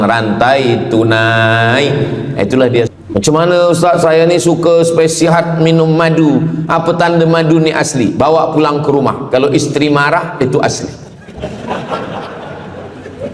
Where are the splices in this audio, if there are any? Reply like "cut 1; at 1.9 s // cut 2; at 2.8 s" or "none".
cut 1; at 2.9 s